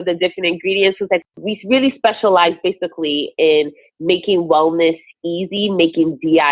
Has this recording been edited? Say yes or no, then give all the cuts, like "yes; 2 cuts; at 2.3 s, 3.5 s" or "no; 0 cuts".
yes; 1 cut; at 1.2 s